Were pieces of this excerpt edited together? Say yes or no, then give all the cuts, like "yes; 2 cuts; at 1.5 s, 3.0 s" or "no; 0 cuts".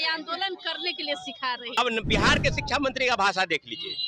yes; 1 cut; at 1.8 s